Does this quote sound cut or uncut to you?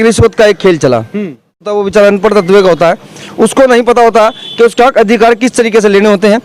cut